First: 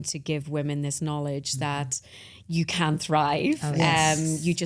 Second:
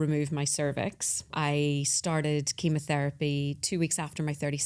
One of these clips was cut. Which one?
second; 1 cut; at 1.3 s

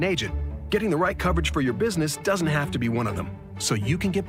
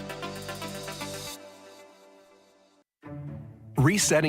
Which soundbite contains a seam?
second; 1 cut; at 3.0 s

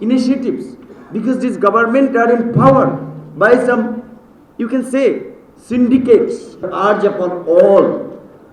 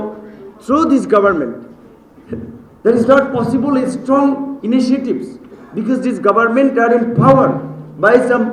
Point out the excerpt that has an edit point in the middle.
first; 1 cut; at 6.7 s

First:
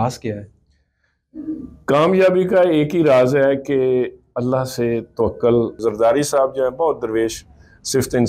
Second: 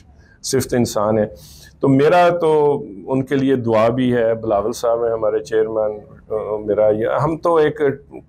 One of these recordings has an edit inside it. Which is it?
first; 1 cut; at 5.8 s

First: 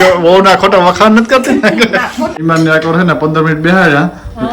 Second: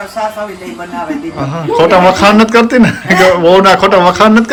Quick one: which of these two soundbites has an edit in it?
first; 1 cut; at 2.4 s

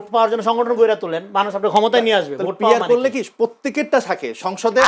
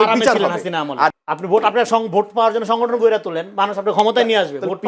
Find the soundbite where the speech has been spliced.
second; 1 cut; at 1.2 s

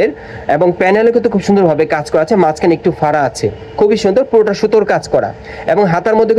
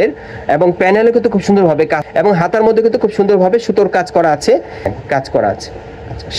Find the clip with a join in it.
second; 2 cuts; at 2.0 s, 4.9 s

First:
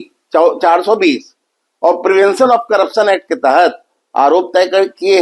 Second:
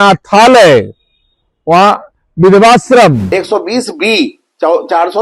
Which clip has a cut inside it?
second; 1 cut; at 3.2 s

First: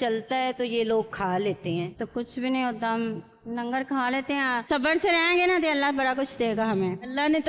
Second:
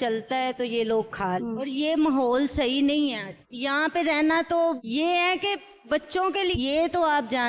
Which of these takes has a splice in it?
second; 2 cuts; at 1.4 s, 6.5 s

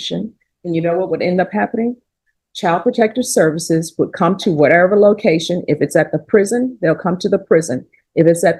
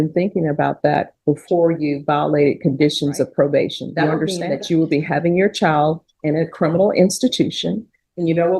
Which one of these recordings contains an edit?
second; 1 cut; at 4.4 s

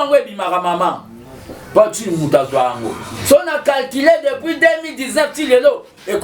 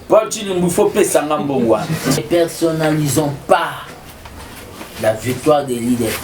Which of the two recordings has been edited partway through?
second; 1 cut; at 2.2 s

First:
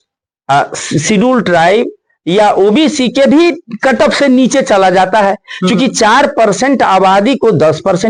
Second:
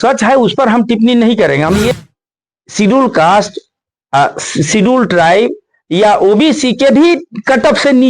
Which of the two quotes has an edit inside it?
second; 1 cut; at 1.9 s

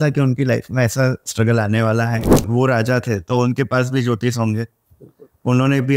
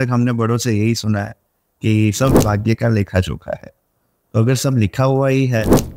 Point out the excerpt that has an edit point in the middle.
first; 1 cut; at 2.4 s

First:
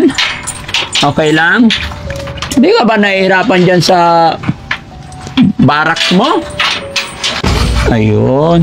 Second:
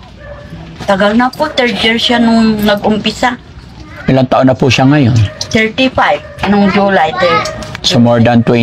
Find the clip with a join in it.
first; 1 cut; at 7.4 s

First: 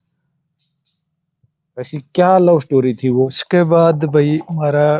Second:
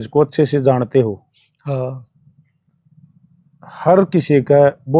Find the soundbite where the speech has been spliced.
first; 1 cut; at 3.4 s

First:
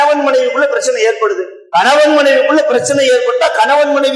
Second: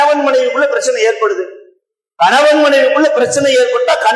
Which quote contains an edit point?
first; 1 cut; at 1.5 s

